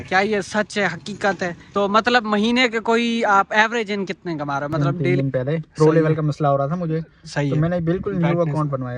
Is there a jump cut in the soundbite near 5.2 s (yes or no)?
yes